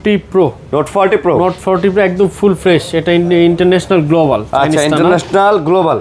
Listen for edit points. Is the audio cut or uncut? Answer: uncut